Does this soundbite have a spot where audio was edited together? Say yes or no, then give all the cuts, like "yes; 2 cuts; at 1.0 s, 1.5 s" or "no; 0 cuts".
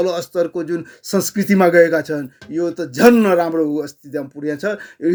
no; 0 cuts